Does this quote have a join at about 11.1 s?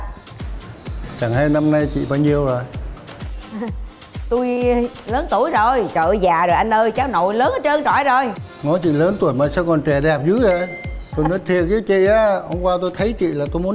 yes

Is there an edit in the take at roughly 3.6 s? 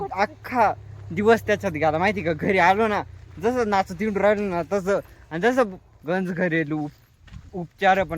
no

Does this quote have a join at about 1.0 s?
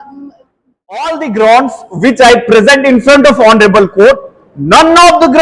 yes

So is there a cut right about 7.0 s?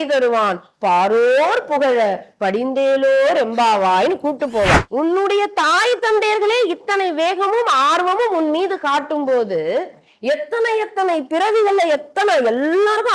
no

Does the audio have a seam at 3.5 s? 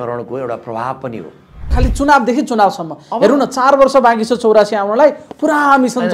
no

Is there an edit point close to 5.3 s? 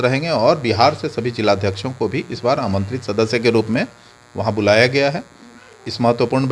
no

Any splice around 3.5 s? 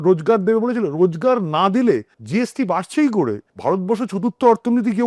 yes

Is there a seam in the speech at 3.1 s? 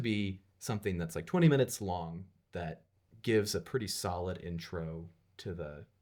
no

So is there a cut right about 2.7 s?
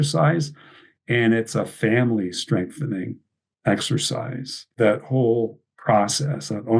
no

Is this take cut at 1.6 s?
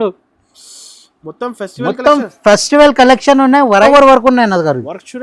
no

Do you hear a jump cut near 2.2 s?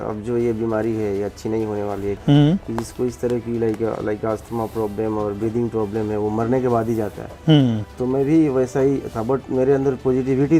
yes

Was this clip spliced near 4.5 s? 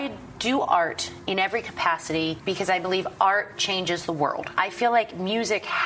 yes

